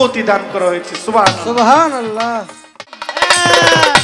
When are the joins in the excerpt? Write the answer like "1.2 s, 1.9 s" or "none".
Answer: 2.9 s